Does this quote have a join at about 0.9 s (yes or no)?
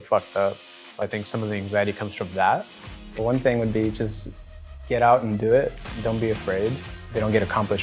yes